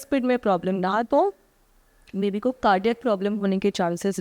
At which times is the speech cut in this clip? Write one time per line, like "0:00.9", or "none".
none